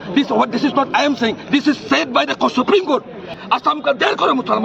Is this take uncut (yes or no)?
no